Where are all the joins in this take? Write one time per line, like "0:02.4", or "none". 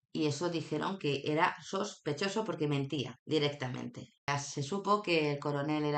0:04.1

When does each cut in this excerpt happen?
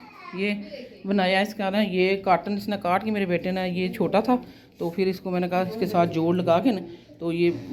none

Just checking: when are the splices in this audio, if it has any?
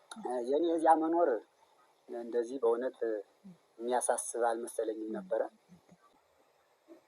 0:06.1

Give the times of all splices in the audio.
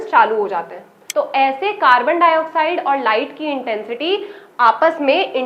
0:01.0

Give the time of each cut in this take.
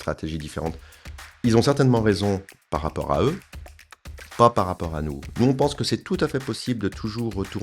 0:05.2

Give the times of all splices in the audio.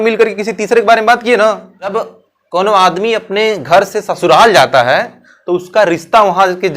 0:01.9

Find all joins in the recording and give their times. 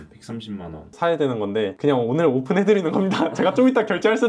0:00.9

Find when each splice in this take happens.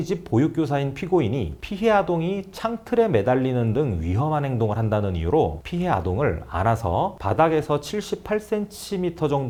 none

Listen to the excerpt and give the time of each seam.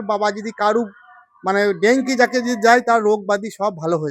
none

